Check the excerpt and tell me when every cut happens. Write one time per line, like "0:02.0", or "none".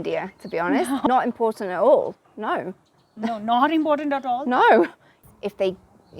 0:01.1
0:05.1